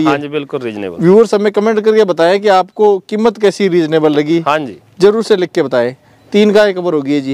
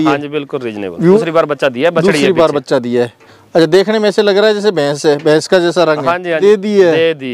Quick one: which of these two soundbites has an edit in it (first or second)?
second